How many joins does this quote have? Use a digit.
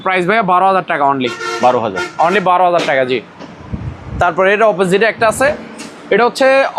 0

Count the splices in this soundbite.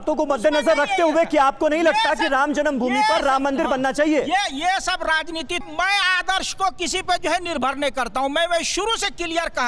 1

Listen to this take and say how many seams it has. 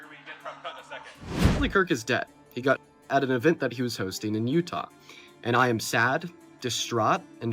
1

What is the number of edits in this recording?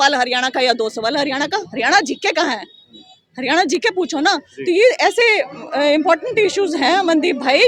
0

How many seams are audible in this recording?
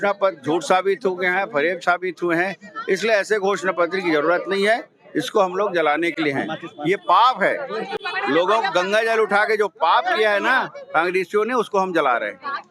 0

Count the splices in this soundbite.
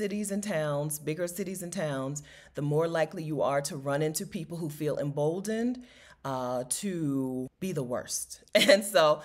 1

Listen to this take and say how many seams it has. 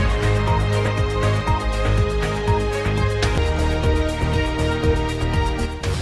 0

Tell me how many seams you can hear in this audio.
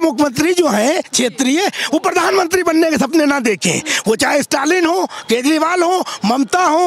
0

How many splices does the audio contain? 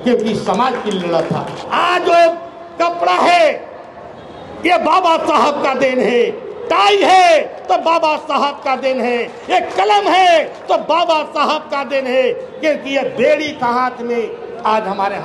1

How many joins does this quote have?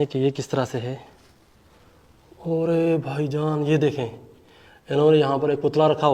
0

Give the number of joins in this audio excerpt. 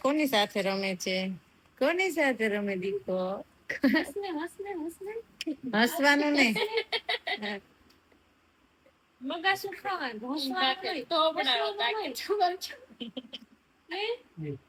0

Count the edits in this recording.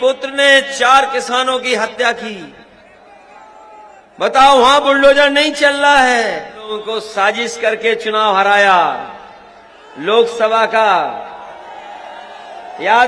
1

